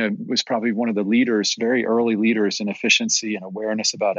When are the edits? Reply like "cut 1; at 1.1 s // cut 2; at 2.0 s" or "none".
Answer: none